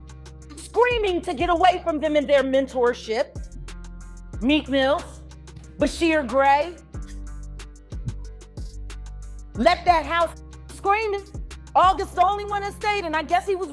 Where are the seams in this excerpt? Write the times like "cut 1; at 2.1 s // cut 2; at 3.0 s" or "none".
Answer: none